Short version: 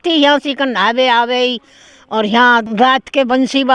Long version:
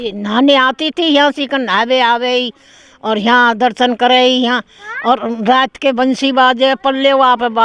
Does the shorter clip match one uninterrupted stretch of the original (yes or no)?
no